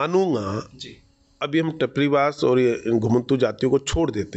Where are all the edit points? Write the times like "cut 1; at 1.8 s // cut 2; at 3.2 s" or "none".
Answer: none